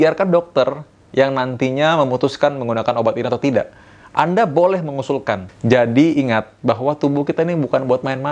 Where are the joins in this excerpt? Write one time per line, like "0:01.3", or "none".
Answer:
0:05.4

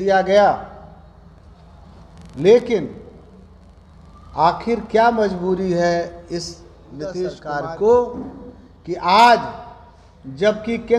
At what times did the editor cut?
0:07.4

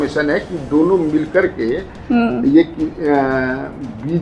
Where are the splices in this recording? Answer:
none

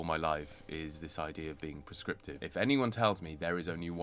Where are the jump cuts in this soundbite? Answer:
0:02.4

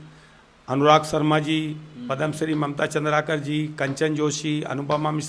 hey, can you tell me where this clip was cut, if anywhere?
none

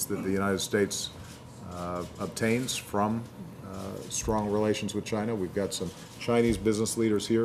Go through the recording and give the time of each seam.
none

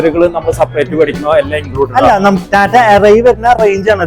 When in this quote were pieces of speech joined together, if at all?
0:02.4

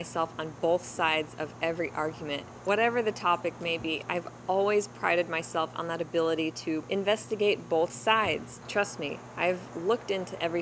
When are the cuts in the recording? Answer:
0:02.5
0:06.9
0:08.5

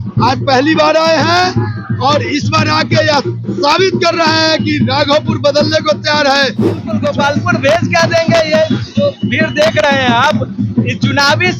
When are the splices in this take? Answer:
0:07.0

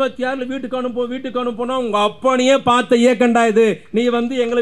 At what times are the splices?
none

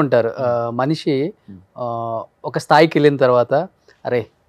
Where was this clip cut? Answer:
none

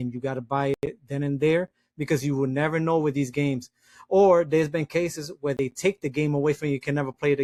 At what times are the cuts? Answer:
none

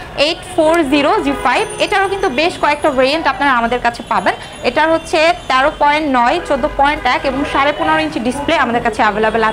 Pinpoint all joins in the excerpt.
none

